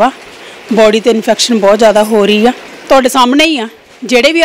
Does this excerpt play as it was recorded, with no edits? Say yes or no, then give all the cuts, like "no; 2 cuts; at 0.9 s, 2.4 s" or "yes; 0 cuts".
no; 1 cut; at 2.7 s